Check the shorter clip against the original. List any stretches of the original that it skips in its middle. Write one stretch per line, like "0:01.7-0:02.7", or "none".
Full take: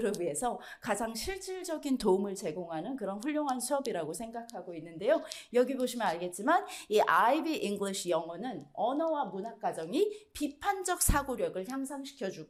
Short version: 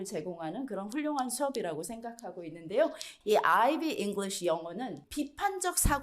0:05.4-0:06.7
0:08.6-0:10.2